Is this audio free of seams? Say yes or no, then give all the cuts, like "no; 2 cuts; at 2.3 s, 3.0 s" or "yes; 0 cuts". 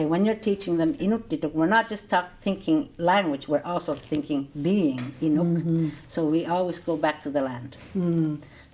no; 1 cut; at 1.0 s